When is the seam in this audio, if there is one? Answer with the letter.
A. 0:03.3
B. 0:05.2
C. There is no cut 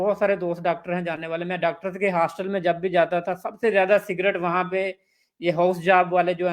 C